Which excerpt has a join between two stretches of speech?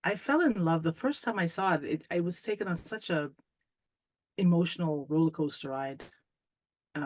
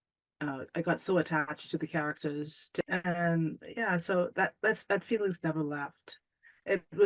second; 1 cut; at 2.8 s

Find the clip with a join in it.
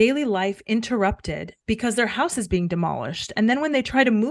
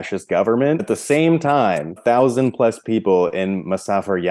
second; 2 cuts; at 0.8 s, 2.0 s

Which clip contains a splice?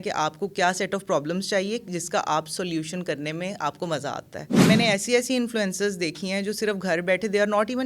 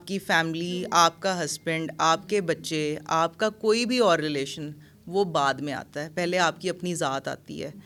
first; 1 cut; at 4.6 s

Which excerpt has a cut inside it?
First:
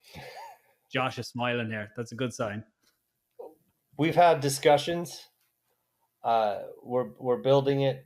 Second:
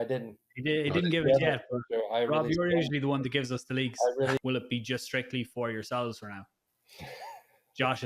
second; 1 cut; at 4.4 s

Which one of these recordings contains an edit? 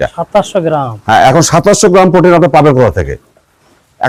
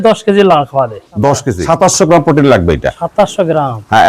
second; 1 cut; at 1.5 s

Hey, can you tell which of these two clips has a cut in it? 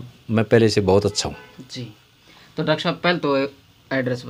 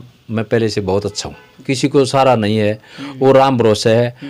second; 1 cut; at 1.6 s

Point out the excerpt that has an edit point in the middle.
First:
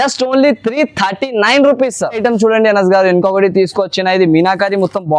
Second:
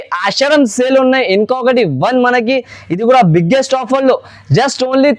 first; 1 cut; at 2.1 s

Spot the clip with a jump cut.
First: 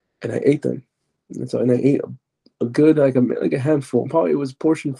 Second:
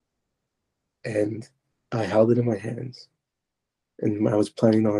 first; 1 cut; at 4.1 s

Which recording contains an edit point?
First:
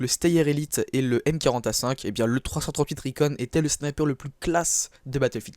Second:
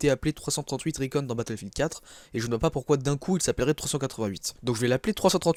first; 1 cut; at 3.5 s

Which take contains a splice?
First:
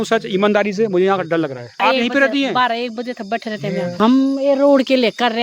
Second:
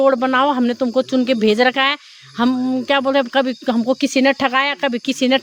first; 2 cuts; at 1.8 s, 3.9 s

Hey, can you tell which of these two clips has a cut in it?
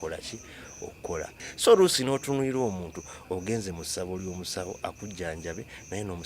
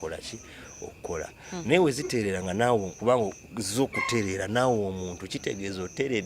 first; 1 cut; at 1.4 s

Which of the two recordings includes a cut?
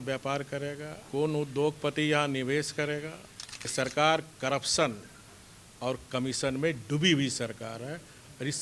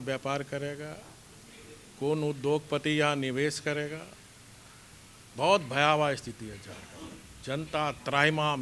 first; 2 cuts; at 0.9 s, 3.6 s

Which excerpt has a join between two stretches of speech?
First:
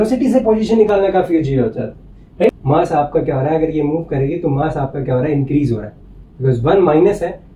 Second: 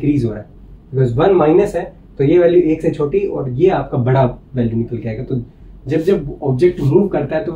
first; 1 cut; at 2.6 s

